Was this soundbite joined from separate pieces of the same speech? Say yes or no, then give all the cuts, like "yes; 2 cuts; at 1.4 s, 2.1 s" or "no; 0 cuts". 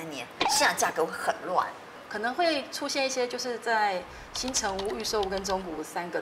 yes; 1 cut; at 2.0 s